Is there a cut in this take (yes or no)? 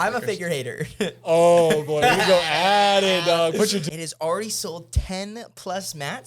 yes